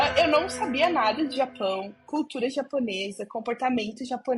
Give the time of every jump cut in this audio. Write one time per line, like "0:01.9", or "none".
none